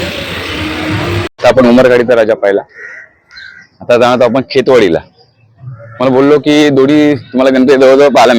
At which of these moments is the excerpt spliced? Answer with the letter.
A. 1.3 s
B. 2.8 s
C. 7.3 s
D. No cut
A